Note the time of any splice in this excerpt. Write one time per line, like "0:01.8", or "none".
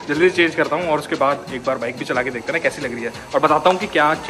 none

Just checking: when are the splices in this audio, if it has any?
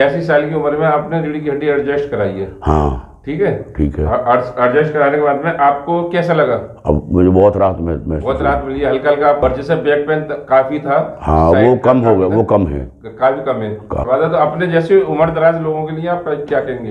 0:09.4
0:13.9

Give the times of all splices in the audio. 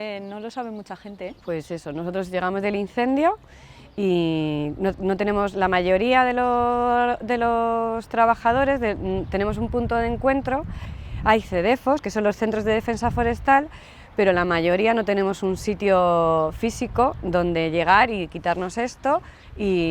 none

